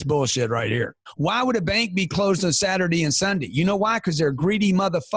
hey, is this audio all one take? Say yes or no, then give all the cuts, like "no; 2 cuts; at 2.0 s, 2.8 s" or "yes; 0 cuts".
no; 1 cut; at 1.0 s